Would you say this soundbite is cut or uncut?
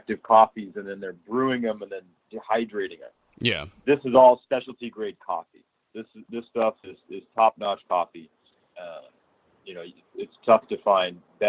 uncut